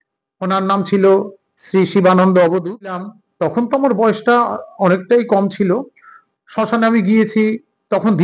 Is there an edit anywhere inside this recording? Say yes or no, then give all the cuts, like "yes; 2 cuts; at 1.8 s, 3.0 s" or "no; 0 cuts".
yes; 1 cut; at 3.2 s